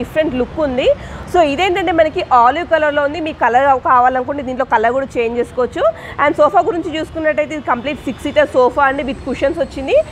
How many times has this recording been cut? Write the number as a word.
zero